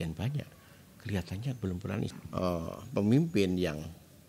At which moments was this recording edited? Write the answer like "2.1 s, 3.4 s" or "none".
2.1 s